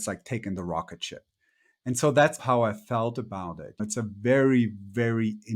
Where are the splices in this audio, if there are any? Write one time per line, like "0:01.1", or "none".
0:02.4
0:03.8